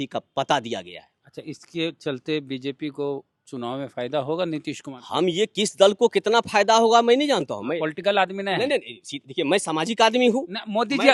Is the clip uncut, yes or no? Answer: yes